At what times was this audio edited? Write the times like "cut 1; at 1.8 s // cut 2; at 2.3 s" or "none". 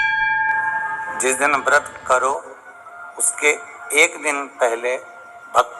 cut 1; at 1.0 s